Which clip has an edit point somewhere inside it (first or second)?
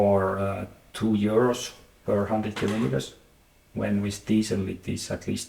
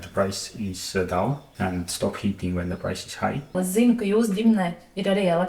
second